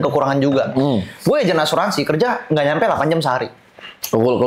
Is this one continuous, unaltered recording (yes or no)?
yes